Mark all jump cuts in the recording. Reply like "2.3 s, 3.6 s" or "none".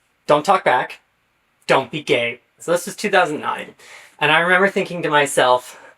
2.6 s